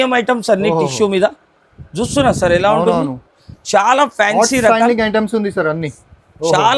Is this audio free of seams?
yes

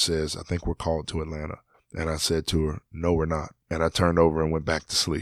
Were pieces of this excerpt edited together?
no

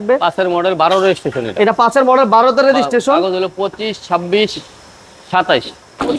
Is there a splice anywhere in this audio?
no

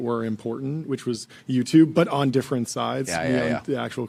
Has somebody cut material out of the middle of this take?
no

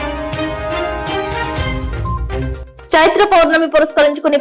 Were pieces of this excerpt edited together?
yes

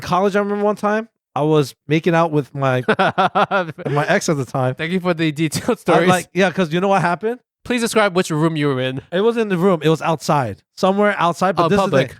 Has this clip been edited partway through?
yes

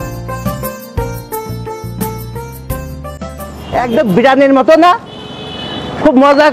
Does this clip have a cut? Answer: no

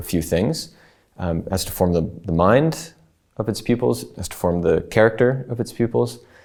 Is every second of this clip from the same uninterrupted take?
yes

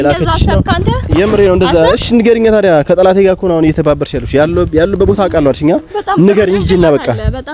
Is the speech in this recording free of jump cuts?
yes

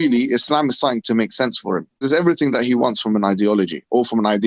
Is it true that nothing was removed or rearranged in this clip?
no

